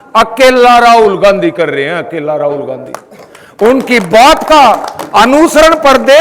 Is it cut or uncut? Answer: uncut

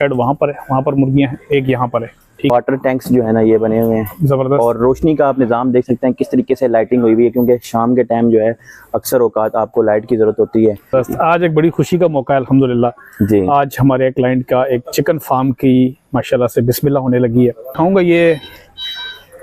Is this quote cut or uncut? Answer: cut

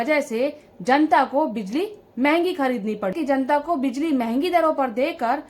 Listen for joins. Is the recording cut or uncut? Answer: cut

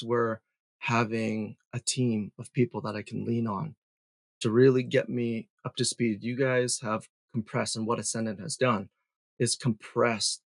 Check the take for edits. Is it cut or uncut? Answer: uncut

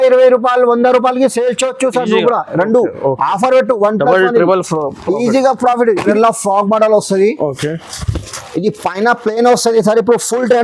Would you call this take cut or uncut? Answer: cut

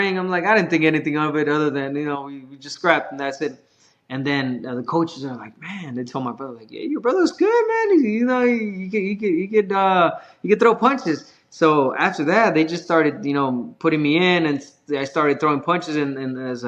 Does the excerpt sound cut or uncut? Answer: uncut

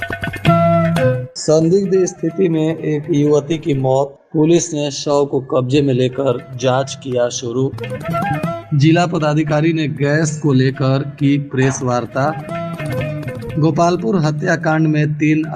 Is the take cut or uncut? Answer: cut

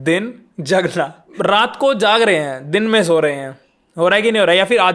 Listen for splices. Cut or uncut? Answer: cut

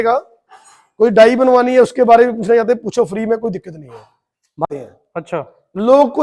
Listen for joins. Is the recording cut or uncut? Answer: cut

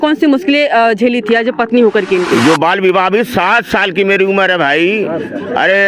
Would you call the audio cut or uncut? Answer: cut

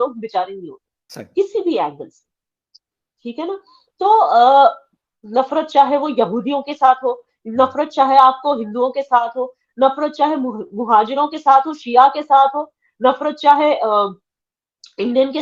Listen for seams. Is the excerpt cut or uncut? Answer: uncut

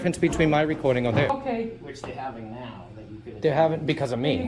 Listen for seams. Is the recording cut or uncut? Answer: cut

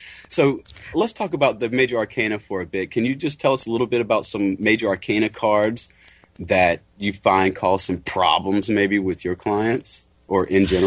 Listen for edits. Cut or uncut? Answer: cut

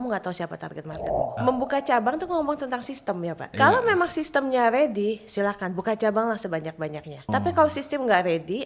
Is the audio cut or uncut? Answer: cut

